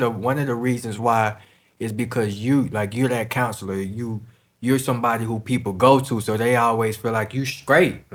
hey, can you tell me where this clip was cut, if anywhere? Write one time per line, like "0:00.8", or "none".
none